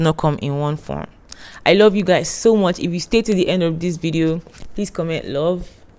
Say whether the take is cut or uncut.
uncut